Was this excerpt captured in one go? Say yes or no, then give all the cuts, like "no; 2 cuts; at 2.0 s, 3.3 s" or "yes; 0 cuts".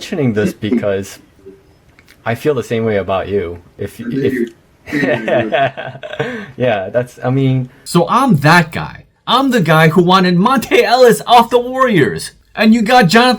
no; 1 cut; at 7.8 s